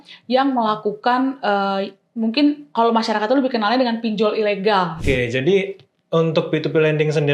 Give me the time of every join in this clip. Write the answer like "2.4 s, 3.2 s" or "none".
5.0 s